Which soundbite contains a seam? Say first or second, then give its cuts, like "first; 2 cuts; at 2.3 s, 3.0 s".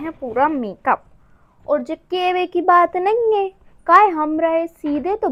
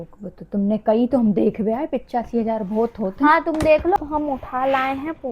second; 1 cut; at 4.0 s